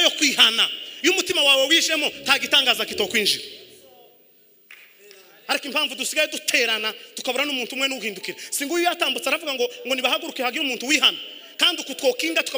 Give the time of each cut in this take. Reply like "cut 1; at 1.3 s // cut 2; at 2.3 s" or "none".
none